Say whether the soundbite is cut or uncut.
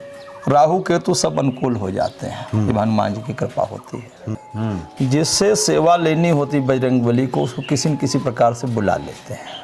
cut